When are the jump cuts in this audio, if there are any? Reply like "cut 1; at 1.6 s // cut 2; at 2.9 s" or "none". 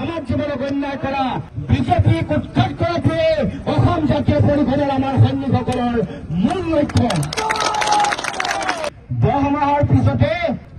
cut 1; at 8.9 s